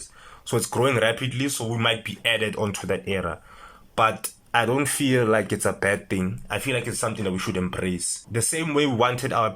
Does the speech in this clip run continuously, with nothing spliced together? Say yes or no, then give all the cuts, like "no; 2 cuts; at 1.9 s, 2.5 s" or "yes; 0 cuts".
no; 2 cuts; at 4.3 s, 8.2 s